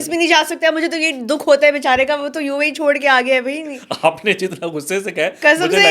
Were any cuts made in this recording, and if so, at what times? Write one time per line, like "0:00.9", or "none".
none